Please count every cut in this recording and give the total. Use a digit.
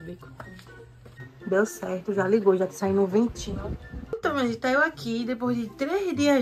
2